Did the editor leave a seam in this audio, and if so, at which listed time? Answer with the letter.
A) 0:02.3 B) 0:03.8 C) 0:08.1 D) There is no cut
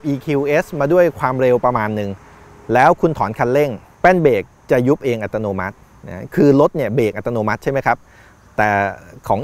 B